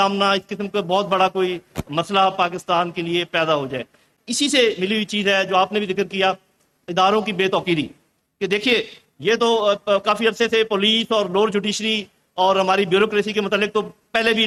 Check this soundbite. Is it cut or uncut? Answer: uncut